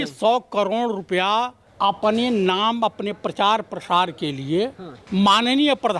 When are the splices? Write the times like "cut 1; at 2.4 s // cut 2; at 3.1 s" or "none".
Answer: cut 1; at 1.6 s // cut 2; at 4.9 s

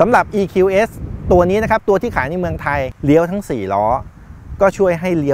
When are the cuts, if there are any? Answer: cut 1; at 2.9 s

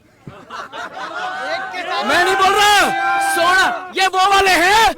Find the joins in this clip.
none

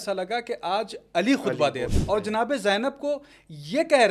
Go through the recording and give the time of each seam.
cut 1; at 1.9 s

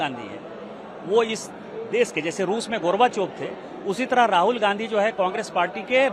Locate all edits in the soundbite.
none

